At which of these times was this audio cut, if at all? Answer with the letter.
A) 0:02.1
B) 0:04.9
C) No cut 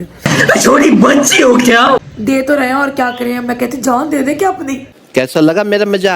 A